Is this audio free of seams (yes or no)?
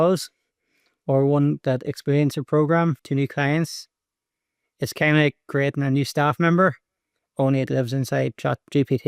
no